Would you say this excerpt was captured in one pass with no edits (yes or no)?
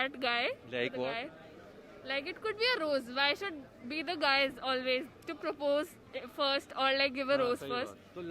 yes